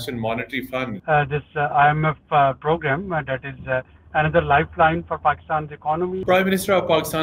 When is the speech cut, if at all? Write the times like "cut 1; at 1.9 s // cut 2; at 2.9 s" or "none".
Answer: cut 1; at 0.9 s // cut 2; at 6.2 s